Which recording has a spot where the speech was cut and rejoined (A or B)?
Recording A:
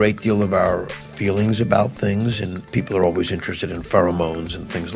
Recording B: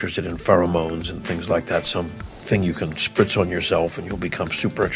A